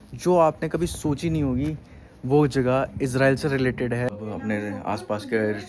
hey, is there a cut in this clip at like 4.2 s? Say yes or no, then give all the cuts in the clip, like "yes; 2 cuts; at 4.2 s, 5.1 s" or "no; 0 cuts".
yes; 1 cut; at 4.2 s